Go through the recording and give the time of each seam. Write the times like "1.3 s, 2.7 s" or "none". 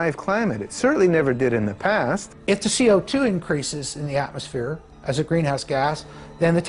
2.3 s